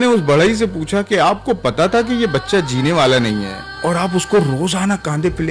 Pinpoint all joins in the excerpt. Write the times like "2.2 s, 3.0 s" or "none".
none